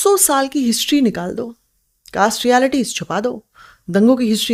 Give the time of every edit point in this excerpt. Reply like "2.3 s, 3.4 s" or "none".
none